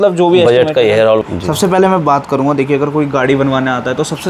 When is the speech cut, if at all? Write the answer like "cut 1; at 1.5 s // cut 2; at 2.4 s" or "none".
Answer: cut 1; at 1.2 s